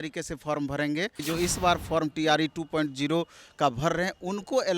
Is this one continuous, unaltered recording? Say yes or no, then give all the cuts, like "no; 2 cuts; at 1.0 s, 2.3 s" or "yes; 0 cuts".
no; 1 cut; at 1.2 s